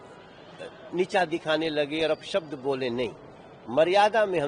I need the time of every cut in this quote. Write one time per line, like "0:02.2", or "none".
none